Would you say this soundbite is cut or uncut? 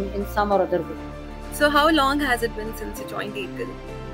uncut